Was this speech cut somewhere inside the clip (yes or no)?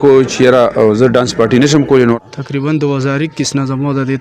yes